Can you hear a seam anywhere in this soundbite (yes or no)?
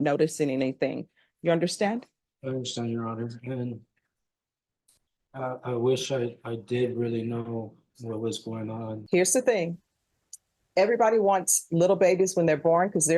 yes